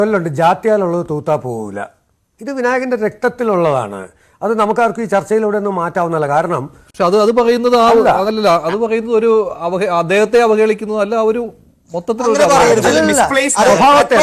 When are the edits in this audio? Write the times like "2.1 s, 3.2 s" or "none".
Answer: 6.8 s